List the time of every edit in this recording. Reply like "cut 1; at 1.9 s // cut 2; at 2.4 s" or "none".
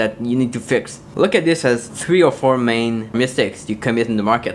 cut 1; at 1.0 s // cut 2; at 1.9 s // cut 3; at 3.1 s